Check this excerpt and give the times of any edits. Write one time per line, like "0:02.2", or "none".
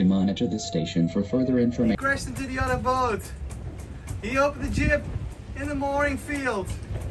0:01.9